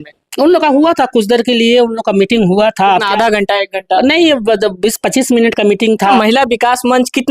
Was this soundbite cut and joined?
yes; 1 cut; at 6.1 s

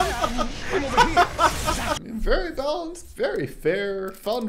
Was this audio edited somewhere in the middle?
yes; 1 cut; at 2.0 s

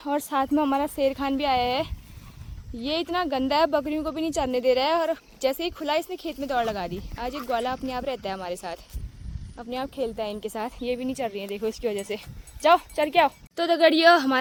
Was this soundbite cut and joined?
no; 0 cuts

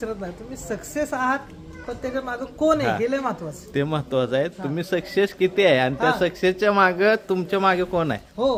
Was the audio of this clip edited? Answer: no; 0 cuts

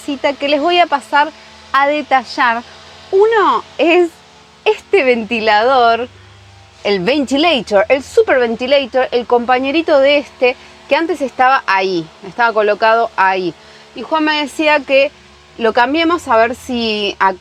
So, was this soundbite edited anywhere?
no; 0 cuts

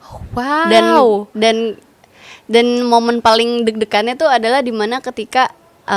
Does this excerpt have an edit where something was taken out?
no; 0 cuts

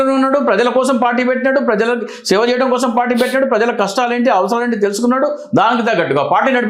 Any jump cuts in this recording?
no; 0 cuts

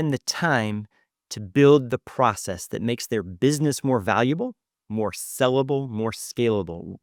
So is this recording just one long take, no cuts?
yes; 0 cuts

